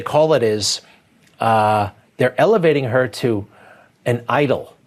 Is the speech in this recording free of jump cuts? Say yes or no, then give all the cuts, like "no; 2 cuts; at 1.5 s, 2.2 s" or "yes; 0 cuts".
yes; 0 cuts